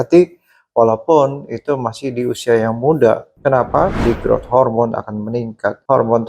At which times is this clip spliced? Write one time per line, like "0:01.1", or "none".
0:03.9